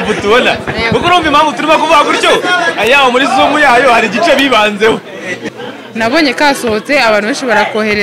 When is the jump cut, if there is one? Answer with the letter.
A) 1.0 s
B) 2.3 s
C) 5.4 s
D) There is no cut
C